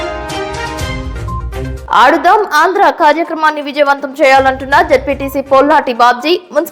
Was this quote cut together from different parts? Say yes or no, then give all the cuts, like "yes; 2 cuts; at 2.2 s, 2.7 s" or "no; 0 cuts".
yes; 1 cut; at 1.7 s